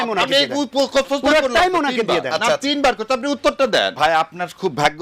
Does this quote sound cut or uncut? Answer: cut